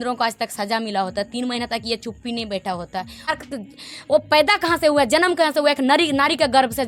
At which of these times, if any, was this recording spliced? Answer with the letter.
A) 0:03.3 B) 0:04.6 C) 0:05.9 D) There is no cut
A